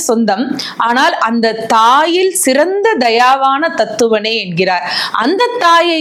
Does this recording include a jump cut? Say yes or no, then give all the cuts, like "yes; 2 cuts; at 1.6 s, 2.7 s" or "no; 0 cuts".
no; 0 cuts